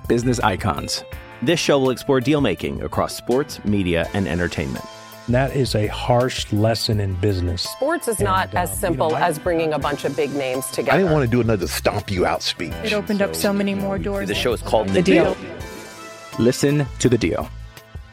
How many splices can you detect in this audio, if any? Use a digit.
0